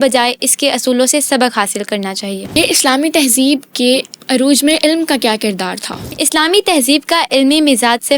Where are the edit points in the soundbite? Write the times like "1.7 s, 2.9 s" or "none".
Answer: 2.6 s, 4.1 s, 6.0 s